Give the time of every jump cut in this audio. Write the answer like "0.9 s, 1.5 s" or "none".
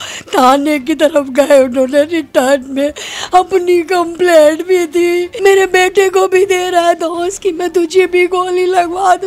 5.3 s